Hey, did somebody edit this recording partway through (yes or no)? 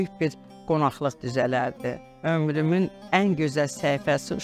yes